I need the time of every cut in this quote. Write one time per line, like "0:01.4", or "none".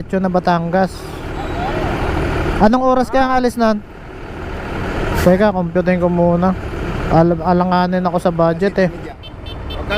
0:09.0